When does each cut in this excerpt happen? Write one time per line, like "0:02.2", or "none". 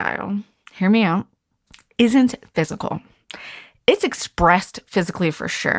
none